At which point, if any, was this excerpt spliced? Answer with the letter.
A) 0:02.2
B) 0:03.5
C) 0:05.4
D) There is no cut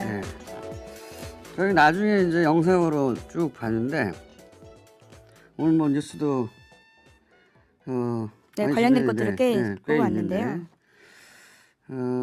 D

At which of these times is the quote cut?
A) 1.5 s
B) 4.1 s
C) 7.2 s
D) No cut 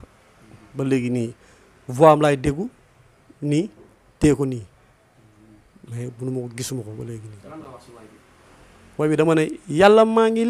D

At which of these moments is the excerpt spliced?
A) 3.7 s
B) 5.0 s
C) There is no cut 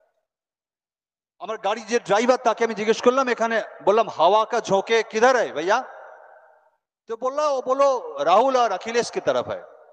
C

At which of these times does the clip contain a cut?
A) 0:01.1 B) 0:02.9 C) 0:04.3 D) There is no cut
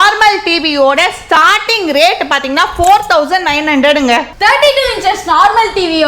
C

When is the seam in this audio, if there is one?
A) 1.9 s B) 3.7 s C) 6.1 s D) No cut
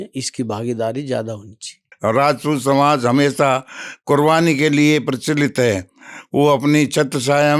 A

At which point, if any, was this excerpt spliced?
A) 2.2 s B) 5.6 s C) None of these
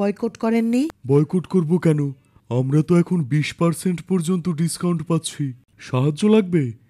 B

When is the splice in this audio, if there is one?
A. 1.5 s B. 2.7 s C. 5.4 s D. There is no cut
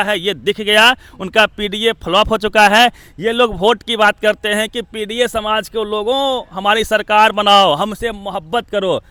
D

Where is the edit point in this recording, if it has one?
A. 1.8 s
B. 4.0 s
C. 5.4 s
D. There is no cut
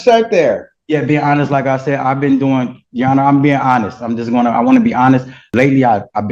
C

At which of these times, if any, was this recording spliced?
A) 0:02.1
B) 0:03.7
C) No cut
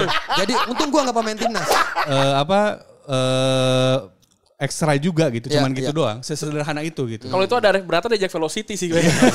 A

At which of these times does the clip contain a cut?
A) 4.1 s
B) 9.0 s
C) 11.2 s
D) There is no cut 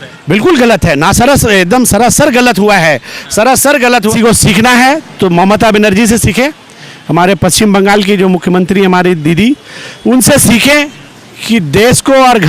A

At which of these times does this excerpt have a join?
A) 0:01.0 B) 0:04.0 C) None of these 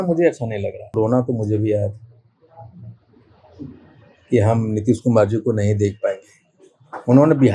A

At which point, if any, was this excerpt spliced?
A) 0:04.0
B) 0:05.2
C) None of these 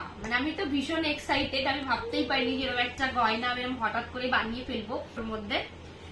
B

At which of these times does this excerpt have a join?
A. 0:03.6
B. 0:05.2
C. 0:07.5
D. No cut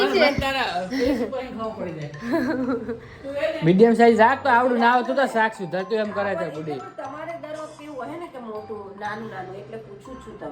A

